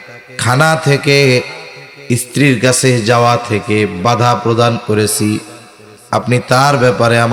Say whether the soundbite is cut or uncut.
uncut